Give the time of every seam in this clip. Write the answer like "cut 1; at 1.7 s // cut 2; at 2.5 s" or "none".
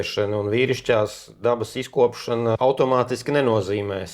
cut 1; at 2.6 s